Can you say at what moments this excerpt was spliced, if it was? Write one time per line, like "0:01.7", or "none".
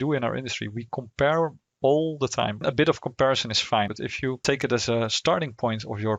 0:02.6
0:03.9